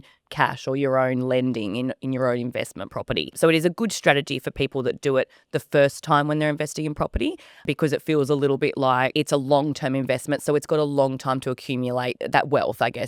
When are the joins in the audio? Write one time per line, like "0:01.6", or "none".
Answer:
0:03.4
0:07.6
0:12.2